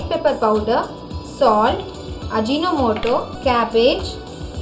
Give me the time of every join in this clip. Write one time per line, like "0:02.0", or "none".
0:03.3